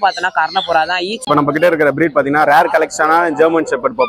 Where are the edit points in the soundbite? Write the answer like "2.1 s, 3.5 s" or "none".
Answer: 1.2 s